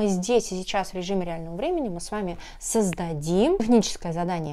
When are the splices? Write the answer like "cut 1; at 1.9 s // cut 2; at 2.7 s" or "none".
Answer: cut 1; at 3.6 s